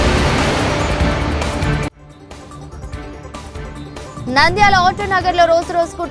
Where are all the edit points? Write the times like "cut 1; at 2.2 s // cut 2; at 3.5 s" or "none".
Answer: cut 1; at 3.4 s // cut 2; at 4.2 s

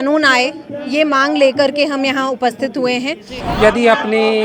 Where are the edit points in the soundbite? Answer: cut 1; at 3.4 s

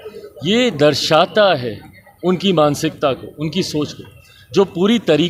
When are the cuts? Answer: none

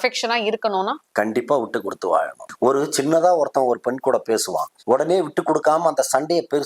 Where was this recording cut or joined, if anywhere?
cut 1; at 1.0 s // cut 2; at 2.4 s // cut 3; at 4.7 s

